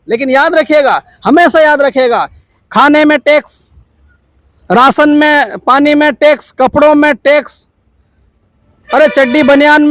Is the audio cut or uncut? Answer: cut